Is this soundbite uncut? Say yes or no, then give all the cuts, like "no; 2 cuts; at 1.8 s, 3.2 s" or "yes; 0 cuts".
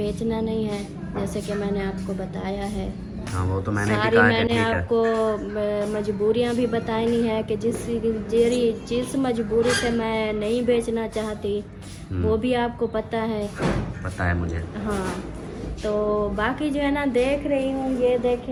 yes; 0 cuts